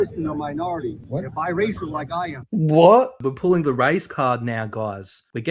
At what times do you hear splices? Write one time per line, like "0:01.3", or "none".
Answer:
0:03.2

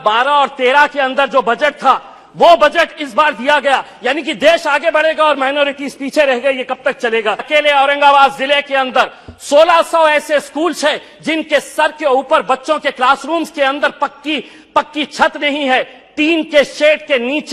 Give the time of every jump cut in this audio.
0:07.5

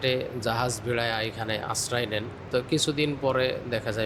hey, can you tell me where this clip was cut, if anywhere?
0:02.4

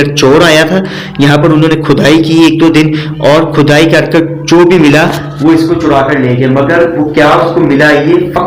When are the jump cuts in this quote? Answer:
none

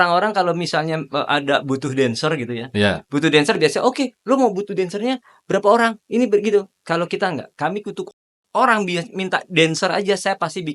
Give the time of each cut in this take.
none

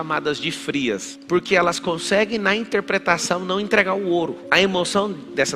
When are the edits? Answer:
0:01.1

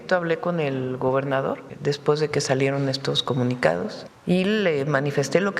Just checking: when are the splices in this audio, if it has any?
0:01.7
0:04.1

